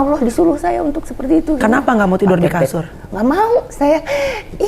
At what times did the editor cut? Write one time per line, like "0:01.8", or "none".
0:01.6